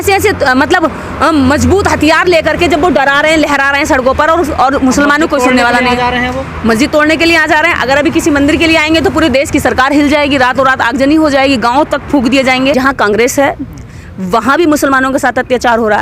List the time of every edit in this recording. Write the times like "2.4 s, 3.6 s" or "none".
12.7 s